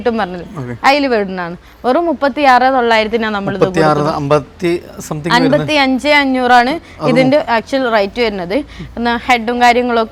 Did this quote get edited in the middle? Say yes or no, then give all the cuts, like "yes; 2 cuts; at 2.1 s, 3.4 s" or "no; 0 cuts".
no; 0 cuts